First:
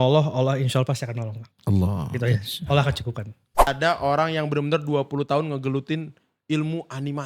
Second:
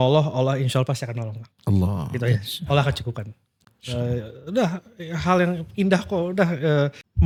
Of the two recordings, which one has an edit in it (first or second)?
first